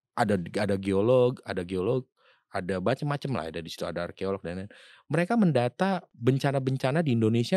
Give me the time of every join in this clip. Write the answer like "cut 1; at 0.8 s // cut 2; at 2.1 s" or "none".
cut 1; at 6.1 s